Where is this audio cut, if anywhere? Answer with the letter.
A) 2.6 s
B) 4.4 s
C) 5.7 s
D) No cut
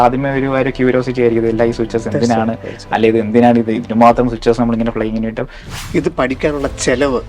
C